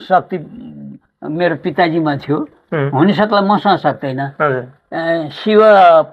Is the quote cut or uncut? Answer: uncut